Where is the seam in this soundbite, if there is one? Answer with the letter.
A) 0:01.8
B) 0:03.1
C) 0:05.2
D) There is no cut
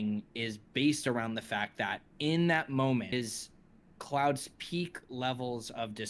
B